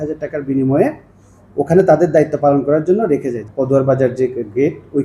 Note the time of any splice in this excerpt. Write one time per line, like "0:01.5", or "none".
0:03.4